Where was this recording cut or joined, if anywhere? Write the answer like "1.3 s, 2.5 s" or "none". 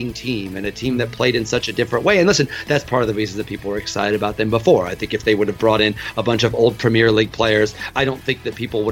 7.9 s